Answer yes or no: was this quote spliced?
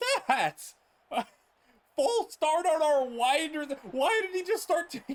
no